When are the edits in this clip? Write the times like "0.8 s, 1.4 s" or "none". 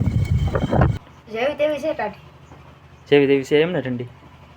0.9 s